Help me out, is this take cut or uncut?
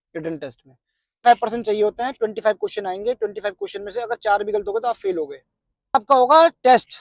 cut